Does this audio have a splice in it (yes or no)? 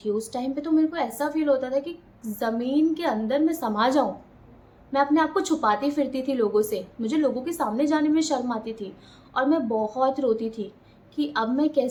no